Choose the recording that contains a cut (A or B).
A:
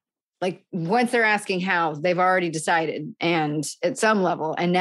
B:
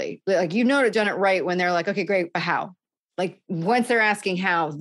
B